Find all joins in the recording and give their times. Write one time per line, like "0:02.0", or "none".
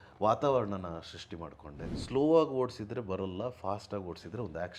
0:01.9